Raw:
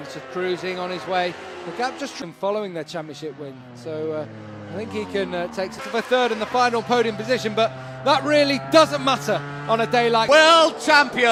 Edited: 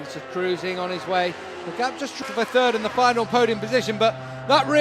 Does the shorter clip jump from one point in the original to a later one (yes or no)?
yes